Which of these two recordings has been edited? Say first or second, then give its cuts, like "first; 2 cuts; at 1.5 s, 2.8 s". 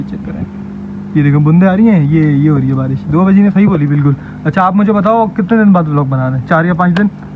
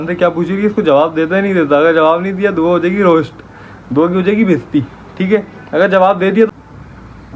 second; 2 cuts; at 5.1 s, 6.5 s